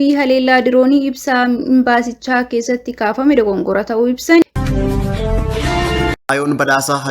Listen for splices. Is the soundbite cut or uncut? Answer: cut